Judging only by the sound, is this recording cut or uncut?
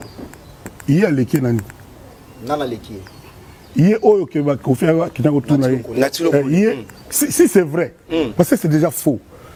uncut